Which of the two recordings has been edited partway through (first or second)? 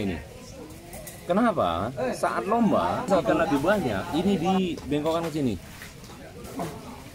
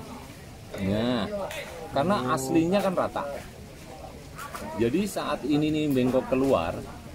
first